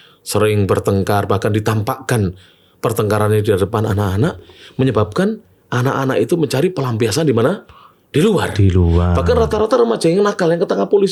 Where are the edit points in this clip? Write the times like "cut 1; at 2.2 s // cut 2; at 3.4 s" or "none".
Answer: none